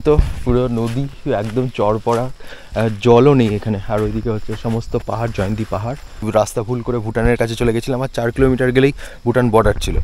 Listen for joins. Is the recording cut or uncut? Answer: cut